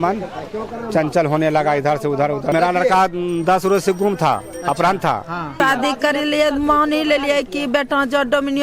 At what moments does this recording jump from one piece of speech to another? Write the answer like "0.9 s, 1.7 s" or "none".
2.5 s, 5.6 s